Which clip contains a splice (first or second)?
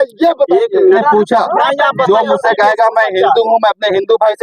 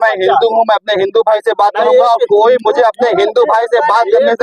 first